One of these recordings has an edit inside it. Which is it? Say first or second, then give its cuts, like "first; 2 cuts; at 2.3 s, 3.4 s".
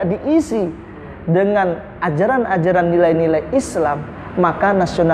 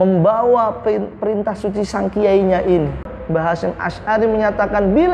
second; 1 cut; at 3.1 s